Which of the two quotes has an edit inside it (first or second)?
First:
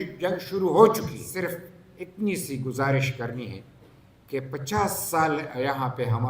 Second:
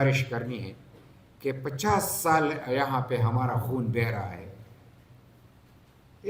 first